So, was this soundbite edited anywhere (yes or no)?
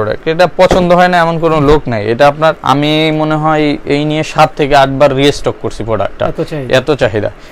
no